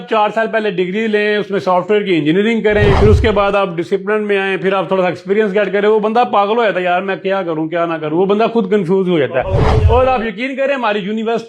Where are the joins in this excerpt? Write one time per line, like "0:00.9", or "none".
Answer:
0:03.0